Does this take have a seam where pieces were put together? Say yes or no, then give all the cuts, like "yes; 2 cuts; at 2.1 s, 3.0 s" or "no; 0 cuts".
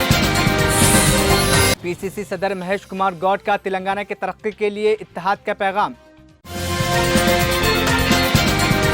yes; 1 cut; at 1.7 s